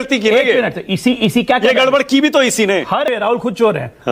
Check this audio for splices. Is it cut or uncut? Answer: cut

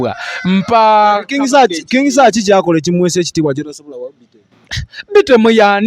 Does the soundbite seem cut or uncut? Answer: uncut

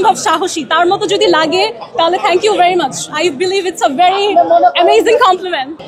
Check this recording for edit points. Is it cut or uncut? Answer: uncut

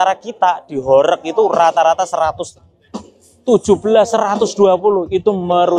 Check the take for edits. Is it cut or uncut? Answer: uncut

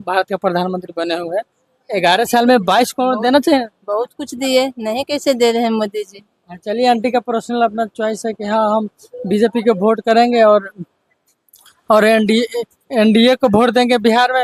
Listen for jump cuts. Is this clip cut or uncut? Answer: uncut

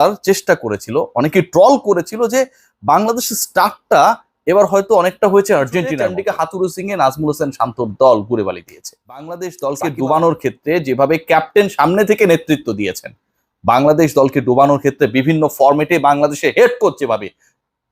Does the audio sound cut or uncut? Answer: cut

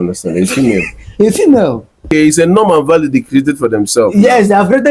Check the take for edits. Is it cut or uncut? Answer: cut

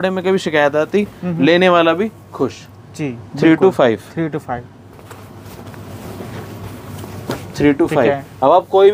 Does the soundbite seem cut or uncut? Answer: uncut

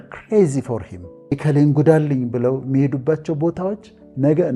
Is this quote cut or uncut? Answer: cut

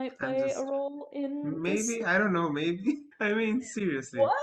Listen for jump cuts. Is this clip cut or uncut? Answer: cut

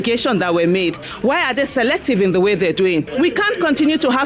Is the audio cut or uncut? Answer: cut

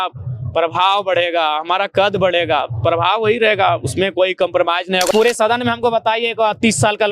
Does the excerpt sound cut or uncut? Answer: cut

